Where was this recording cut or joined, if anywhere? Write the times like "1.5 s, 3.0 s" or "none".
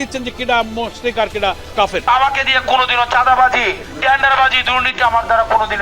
2.1 s